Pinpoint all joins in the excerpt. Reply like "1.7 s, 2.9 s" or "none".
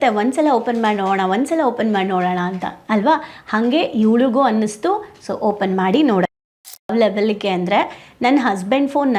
6.5 s